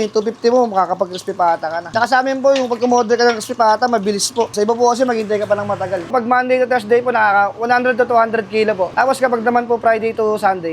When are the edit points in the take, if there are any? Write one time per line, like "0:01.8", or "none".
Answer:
0:04.5
0:06.1